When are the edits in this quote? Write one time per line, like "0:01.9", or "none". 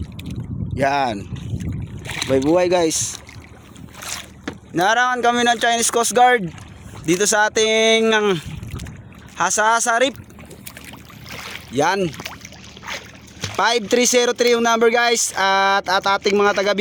none